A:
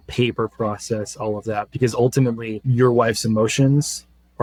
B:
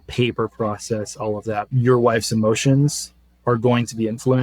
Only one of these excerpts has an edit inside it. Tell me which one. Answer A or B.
B